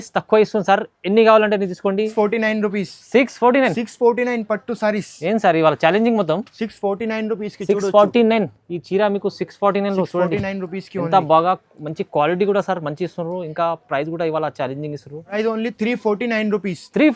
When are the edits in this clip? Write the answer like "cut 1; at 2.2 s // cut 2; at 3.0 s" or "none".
cut 1; at 2.1 s // cut 2; at 15.4 s